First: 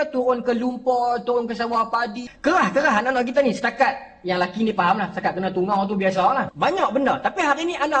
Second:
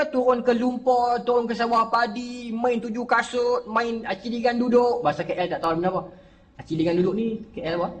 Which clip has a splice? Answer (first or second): first